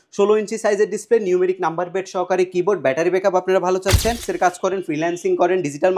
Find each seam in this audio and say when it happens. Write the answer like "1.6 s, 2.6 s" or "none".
4.3 s